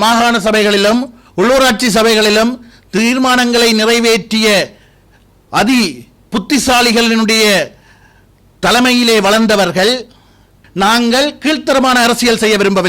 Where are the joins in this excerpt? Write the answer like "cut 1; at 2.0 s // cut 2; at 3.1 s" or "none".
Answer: cut 1; at 10.6 s